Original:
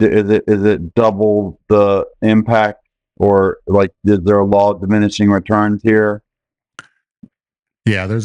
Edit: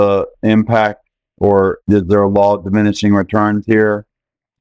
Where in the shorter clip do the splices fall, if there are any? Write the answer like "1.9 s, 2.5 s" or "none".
1.8 s